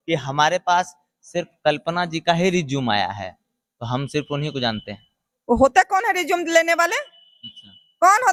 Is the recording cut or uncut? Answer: uncut